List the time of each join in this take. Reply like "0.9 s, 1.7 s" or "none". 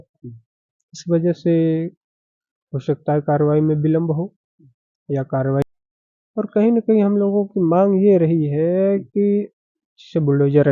5.6 s